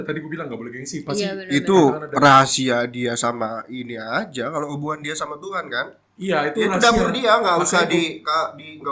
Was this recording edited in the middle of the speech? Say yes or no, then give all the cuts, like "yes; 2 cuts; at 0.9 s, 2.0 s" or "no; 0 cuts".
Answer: no; 0 cuts